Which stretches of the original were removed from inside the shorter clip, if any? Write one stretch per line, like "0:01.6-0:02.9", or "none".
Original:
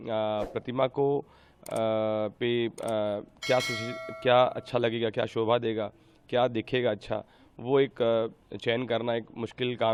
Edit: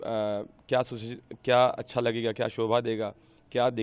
none